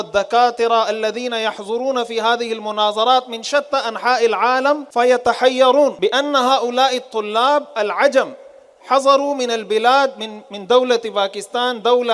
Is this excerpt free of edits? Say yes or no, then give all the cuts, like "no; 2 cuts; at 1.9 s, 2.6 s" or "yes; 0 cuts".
no; 2 cuts; at 4.9 s, 6.0 s